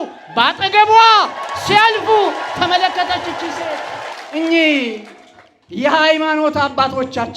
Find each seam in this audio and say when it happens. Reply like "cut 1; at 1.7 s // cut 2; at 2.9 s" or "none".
cut 1; at 4.1 s